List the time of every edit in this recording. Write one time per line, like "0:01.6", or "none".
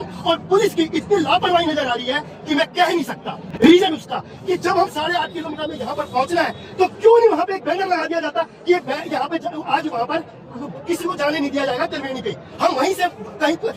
none